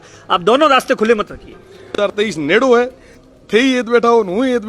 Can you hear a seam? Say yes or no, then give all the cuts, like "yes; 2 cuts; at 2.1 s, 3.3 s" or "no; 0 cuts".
yes; 1 cut; at 2.1 s